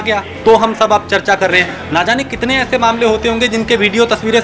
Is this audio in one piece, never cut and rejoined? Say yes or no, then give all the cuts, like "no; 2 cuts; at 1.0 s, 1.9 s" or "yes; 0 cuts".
yes; 0 cuts